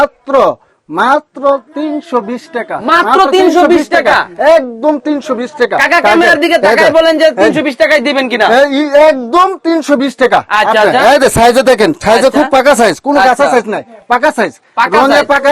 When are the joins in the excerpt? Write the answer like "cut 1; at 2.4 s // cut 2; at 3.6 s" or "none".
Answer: none